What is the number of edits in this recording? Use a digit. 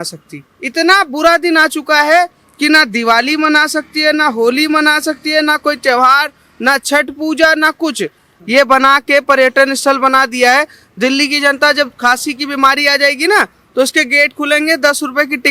1